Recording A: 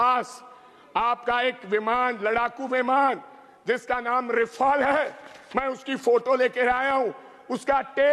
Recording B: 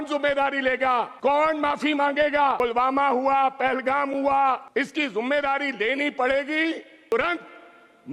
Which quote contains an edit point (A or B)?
B